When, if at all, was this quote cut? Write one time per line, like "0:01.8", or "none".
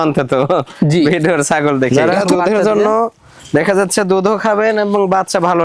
0:01.9